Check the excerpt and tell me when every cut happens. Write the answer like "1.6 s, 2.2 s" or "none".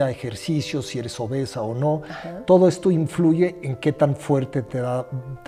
none